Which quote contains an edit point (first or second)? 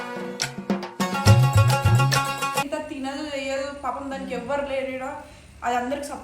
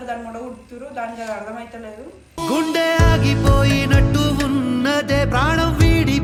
first